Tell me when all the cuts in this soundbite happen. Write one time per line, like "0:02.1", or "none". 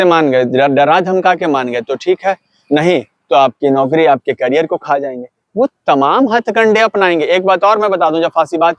none